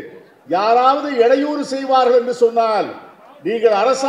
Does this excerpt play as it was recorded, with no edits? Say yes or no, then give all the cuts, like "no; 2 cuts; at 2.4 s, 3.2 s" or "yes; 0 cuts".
yes; 0 cuts